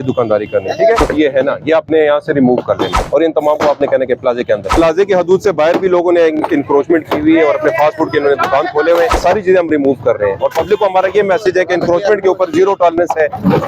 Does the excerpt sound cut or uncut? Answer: cut